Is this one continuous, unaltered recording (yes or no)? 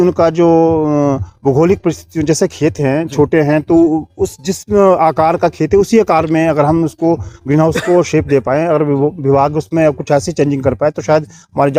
yes